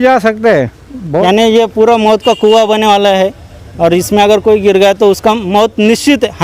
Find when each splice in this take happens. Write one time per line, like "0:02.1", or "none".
0:01.2